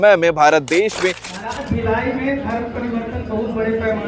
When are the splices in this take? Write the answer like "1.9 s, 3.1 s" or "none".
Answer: 1.3 s